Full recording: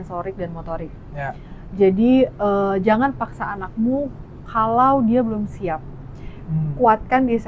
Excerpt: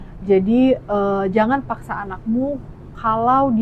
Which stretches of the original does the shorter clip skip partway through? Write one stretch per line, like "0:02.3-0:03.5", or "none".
none